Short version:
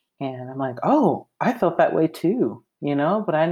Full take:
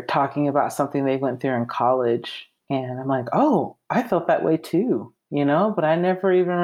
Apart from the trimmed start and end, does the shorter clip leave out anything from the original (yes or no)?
no